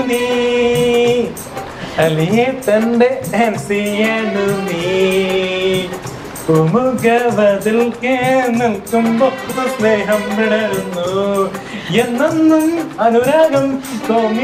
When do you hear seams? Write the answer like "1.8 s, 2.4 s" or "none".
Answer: none

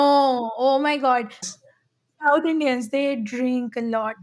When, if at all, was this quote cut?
1.5 s

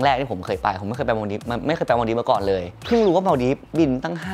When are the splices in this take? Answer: none

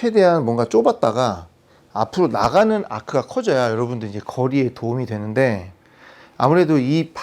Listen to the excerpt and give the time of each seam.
none

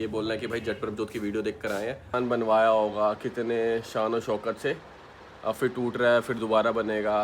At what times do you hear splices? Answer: 2.1 s

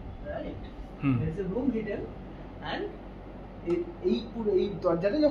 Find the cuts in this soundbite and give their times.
none

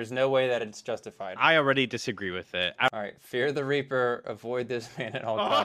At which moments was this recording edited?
2.9 s

